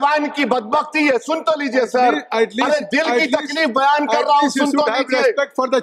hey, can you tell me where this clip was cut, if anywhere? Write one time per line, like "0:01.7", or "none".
none